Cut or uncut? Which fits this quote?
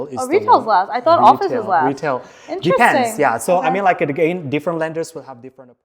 uncut